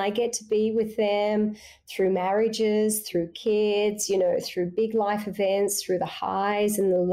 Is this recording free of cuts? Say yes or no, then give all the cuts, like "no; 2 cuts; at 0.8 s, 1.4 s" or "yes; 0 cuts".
yes; 0 cuts